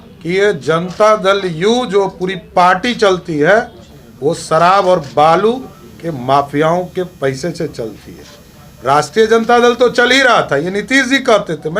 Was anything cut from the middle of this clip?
no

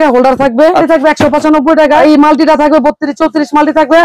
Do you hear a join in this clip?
yes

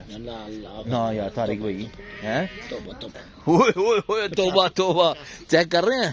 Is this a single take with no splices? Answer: yes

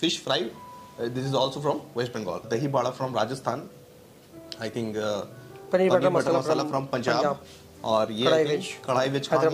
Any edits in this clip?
yes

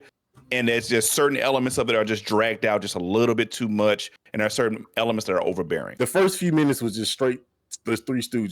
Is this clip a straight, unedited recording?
no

